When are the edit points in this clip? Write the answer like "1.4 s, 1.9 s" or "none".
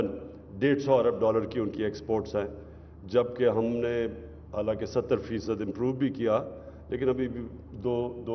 none